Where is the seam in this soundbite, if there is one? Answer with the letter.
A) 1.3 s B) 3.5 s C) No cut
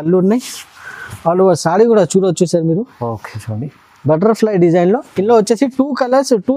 C